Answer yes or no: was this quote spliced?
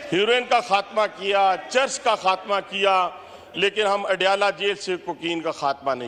no